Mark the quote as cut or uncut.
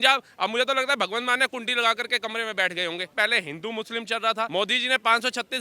cut